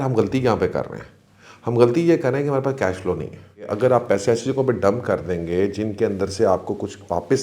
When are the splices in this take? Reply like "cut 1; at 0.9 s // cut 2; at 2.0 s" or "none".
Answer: cut 1; at 3.7 s